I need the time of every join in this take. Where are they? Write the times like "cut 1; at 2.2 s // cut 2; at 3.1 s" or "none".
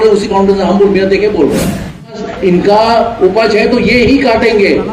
cut 1; at 2.3 s